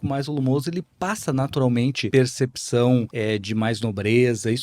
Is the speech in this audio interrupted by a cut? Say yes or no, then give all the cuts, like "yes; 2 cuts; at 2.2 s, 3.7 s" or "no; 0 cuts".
yes; 2 cuts; at 2.0 s, 3.1 s